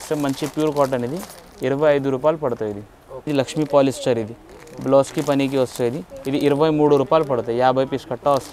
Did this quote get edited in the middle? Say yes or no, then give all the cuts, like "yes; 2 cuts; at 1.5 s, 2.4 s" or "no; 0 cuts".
yes; 1 cut; at 3.3 s